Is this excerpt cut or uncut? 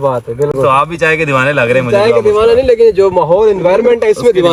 uncut